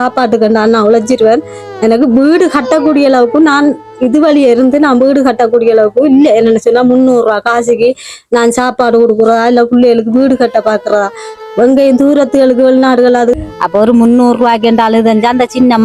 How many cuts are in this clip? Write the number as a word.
one